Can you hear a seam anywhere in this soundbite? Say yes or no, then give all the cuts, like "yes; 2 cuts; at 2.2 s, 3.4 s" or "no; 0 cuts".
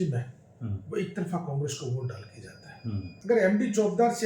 yes; 1 cut; at 3.1 s